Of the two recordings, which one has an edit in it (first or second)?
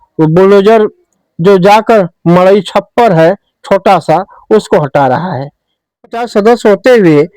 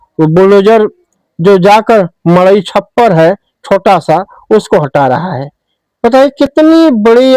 first